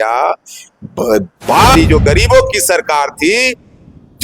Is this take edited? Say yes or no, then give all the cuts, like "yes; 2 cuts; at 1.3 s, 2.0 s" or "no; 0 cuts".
yes; 1 cut; at 1.7 s